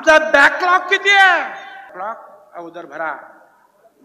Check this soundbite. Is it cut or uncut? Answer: cut